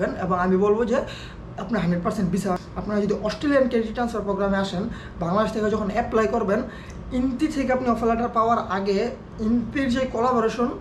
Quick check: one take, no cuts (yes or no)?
no